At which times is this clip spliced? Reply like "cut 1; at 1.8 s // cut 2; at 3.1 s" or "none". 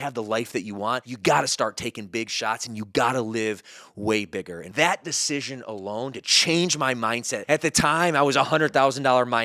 cut 1; at 1.1 s // cut 2; at 4.7 s // cut 3; at 7.3 s